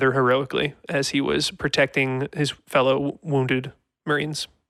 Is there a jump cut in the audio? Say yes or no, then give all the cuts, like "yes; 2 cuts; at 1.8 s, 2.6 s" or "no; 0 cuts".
no; 0 cuts